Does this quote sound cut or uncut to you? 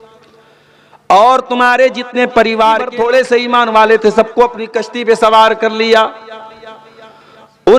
cut